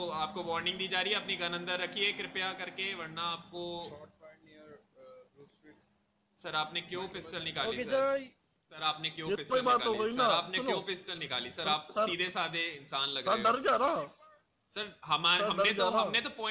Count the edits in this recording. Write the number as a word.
one